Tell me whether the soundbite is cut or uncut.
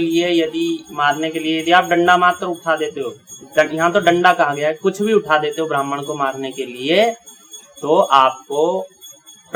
uncut